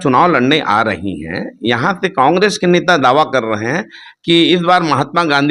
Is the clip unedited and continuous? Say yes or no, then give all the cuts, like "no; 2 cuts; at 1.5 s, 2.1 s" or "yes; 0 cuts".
yes; 0 cuts